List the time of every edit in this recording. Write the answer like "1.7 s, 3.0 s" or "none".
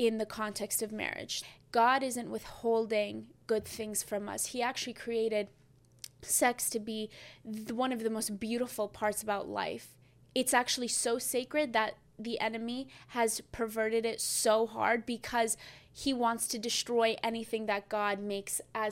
1.3 s